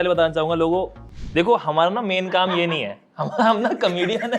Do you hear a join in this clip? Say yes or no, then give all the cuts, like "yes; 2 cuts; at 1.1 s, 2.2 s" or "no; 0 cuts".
no; 0 cuts